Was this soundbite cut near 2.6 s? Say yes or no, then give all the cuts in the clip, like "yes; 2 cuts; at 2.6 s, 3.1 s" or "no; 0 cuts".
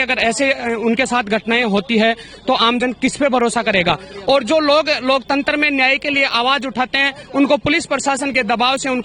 no; 0 cuts